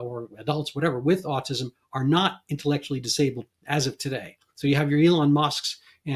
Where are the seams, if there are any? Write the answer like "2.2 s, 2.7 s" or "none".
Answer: none